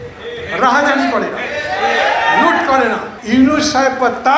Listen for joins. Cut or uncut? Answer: cut